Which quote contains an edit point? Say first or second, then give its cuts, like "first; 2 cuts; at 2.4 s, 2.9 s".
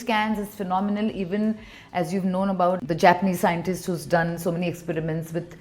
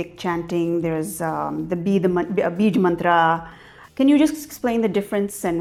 first; 1 cut; at 2.8 s